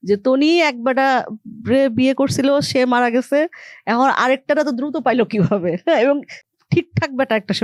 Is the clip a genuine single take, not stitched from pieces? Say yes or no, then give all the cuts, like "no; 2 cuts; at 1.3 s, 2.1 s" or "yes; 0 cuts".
yes; 0 cuts